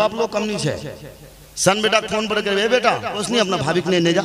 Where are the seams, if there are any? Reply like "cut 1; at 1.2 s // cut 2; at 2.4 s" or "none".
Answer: cut 1; at 3.2 s